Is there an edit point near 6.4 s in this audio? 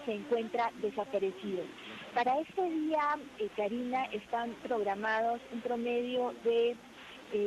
yes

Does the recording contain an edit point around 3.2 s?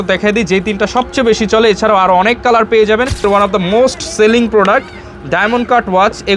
yes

